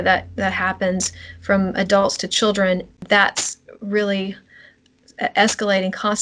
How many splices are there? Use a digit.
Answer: 2